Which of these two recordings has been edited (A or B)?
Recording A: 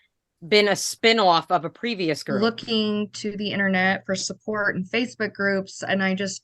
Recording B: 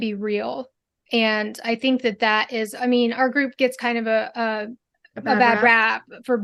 A